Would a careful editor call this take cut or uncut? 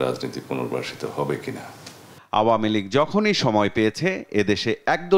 uncut